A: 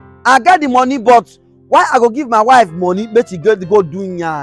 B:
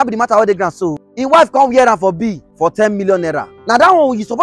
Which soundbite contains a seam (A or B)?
B